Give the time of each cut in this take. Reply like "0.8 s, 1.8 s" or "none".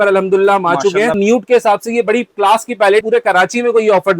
1.2 s, 3.0 s